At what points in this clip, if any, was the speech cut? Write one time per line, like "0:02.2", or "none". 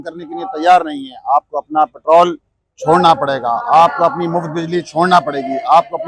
none